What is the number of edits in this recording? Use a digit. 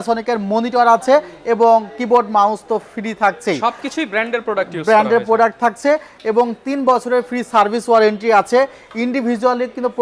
0